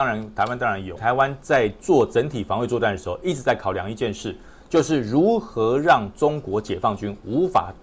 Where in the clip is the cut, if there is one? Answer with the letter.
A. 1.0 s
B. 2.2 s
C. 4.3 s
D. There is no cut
A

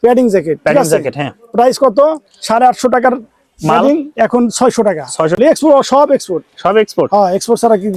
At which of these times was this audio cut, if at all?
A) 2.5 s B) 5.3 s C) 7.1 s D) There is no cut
B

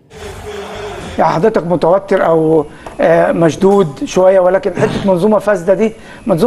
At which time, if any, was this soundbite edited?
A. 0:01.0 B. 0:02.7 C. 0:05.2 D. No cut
A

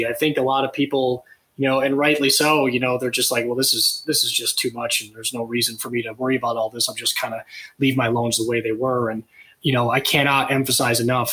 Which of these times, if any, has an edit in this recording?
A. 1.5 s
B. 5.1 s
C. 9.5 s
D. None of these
C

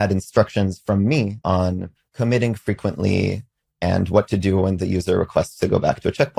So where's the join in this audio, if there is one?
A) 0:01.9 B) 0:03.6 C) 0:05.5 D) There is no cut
A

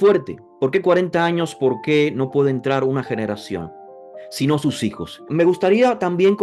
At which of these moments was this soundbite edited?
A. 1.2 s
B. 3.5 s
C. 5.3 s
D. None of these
C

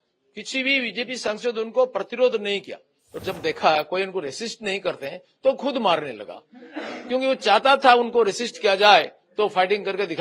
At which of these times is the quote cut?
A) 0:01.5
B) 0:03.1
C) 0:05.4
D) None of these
B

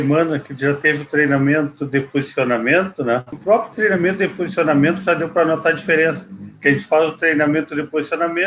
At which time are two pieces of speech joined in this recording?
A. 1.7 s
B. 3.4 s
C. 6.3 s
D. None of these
B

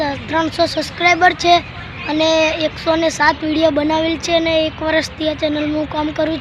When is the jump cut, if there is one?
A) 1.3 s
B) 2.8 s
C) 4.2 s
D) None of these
D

